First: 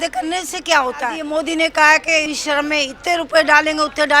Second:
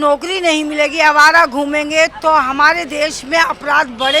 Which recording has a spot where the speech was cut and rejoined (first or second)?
first